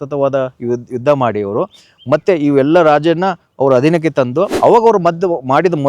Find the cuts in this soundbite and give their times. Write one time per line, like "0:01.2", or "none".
0:04.5